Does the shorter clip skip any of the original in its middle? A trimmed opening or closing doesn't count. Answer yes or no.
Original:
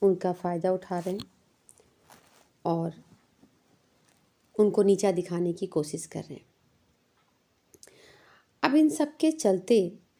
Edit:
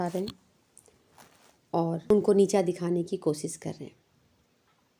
yes